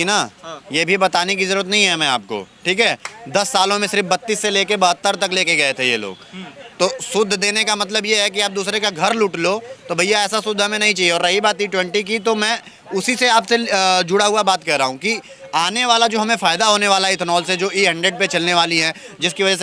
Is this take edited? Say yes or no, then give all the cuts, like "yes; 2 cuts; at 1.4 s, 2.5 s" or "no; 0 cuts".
no; 0 cuts